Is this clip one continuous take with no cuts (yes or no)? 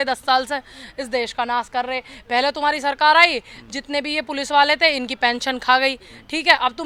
yes